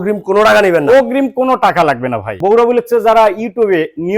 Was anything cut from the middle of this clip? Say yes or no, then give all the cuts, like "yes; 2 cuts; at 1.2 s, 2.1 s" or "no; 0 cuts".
yes; 1 cut; at 2.3 s